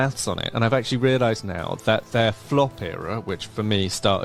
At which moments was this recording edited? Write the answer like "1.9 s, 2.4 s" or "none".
none

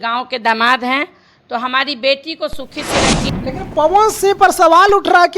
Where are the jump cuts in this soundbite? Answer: 3.2 s

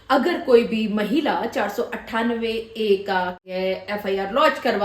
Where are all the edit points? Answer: 3.4 s

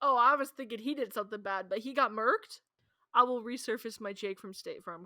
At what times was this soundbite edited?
2.6 s

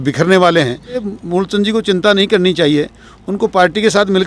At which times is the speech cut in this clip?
1.1 s

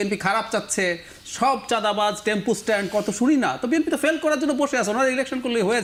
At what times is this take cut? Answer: none

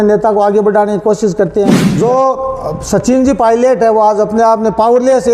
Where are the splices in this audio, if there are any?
1.8 s

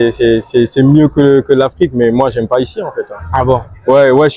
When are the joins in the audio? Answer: none

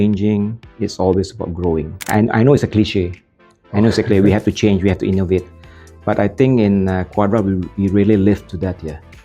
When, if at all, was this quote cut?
2.1 s

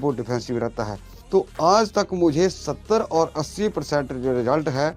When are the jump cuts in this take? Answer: 1.1 s

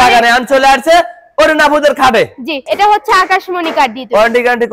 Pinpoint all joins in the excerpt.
2.6 s

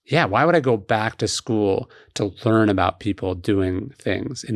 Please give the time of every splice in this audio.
none

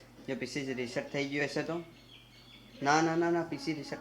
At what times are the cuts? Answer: none

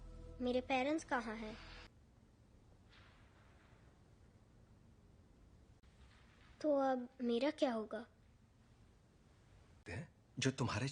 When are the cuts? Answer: 1.9 s

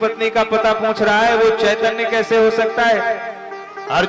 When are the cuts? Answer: none

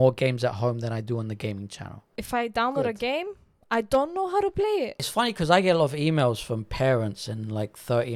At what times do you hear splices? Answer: 2.2 s, 5.0 s

